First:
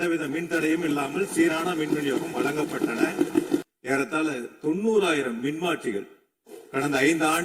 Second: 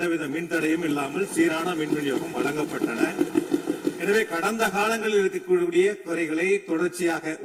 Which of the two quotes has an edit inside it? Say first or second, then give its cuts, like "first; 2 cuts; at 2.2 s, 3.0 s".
first; 1 cut; at 3.6 s